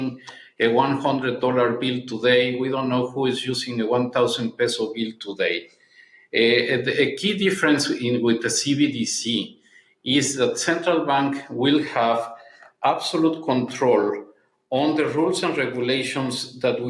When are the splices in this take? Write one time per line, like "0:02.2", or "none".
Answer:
none